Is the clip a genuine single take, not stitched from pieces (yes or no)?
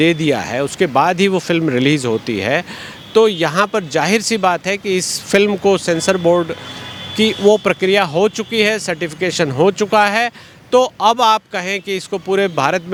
yes